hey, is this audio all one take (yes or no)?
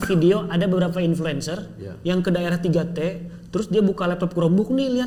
yes